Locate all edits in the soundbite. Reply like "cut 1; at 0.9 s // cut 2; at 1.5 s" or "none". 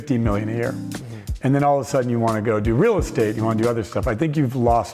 none